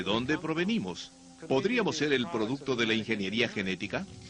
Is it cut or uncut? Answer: cut